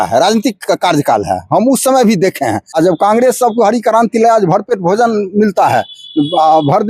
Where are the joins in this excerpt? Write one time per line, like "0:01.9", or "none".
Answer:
0:02.6